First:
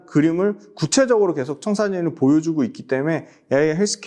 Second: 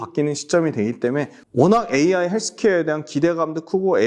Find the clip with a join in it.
second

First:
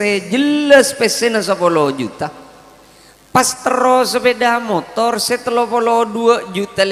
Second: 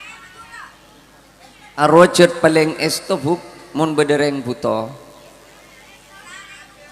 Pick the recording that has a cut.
second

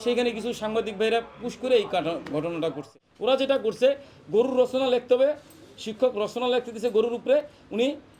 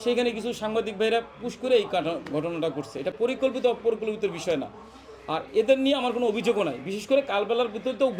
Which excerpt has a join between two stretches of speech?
first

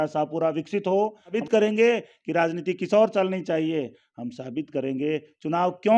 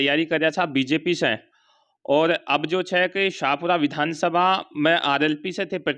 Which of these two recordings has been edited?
first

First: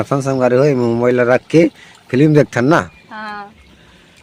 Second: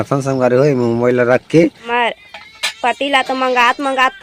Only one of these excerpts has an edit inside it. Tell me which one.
second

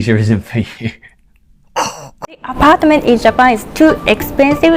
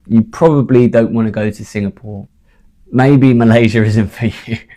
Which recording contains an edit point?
first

